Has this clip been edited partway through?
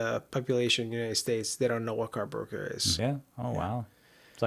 yes; 1 cut; at 2.9 s

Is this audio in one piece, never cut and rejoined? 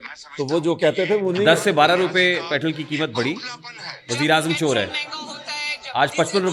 yes; 0 cuts

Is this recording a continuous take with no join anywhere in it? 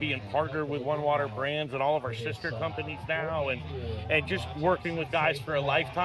yes; 0 cuts

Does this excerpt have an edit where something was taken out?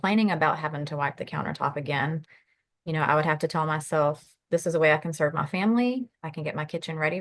no; 0 cuts

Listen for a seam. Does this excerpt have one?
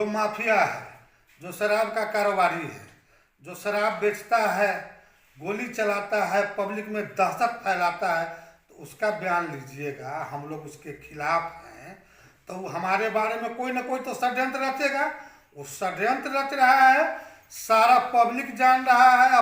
no; 0 cuts

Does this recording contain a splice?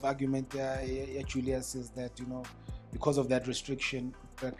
no; 0 cuts

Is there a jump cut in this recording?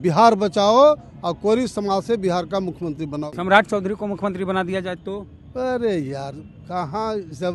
yes; 1 cut; at 3.3 s

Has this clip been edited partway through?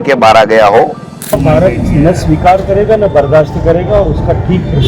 yes; 1 cut; at 1.3 s

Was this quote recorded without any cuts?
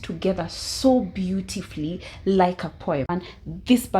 no; 1 cut; at 3.1 s

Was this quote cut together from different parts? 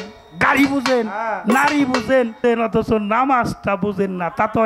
yes; 1 cut; at 2.4 s

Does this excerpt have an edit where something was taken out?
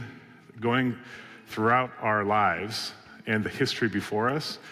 no; 0 cuts

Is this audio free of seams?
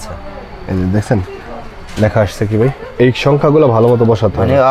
yes; 0 cuts

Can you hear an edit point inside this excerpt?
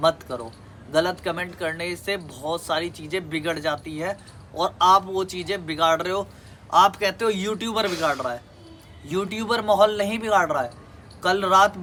no; 0 cuts

